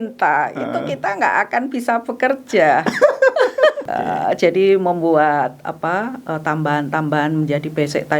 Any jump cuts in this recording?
yes; 1 cut; at 3.8 s

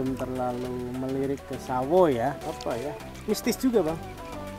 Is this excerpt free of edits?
no; 1 cut; at 2.5 s

